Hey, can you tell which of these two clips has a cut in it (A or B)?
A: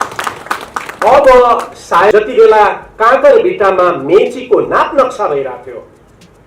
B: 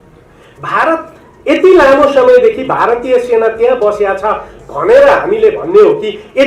A